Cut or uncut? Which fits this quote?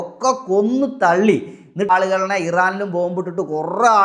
cut